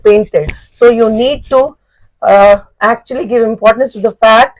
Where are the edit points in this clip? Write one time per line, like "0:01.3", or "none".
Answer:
none